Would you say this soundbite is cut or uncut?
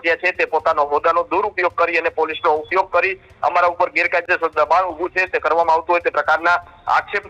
uncut